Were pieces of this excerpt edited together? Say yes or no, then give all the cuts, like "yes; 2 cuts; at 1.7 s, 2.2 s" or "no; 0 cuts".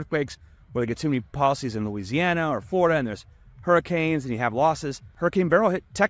yes; 1 cut; at 5.0 s